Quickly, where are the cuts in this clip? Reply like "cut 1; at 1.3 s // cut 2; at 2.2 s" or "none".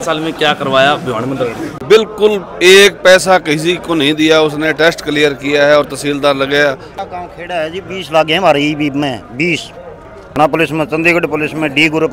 cut 1; at 1.8 s // cut 2; at 6.9 s // cut 3; at 10.4 s